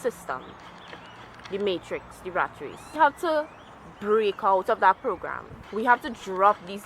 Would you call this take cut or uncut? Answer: cut